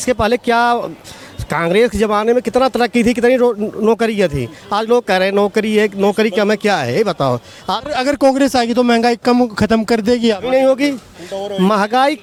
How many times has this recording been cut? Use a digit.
0